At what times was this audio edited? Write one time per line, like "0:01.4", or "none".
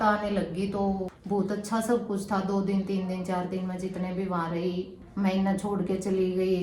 0:01.1
0:05.0